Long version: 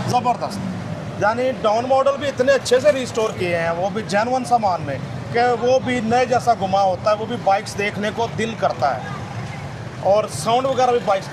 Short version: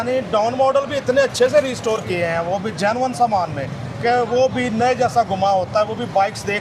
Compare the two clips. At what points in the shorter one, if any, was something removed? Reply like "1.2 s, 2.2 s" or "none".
none